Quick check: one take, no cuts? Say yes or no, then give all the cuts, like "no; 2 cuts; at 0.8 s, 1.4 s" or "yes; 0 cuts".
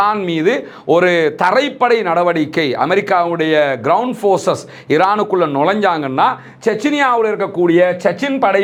yes; 0 cuts